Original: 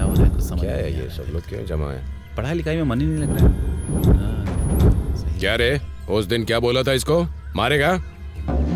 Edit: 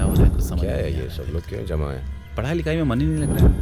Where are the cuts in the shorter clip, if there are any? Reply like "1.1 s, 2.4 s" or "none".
none